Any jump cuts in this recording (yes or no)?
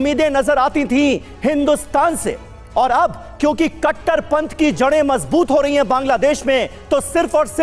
no